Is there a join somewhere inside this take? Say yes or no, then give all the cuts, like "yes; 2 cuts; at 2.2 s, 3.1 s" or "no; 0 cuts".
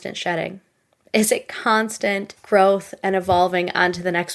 yes; 1 cut; at 2.3 s